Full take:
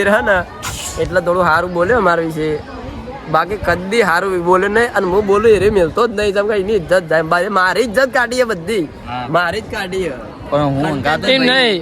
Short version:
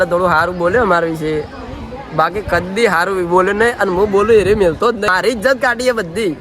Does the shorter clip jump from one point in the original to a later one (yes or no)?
yes